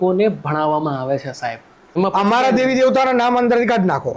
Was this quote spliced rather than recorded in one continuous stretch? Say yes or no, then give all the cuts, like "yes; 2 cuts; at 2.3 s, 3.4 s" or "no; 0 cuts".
yes; 1 cut; at 1.8 s